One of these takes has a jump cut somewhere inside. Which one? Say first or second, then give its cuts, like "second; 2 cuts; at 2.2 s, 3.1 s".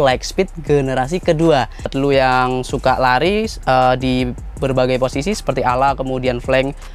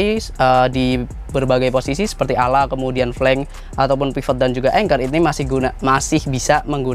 first; 1 cut; at 1.8 s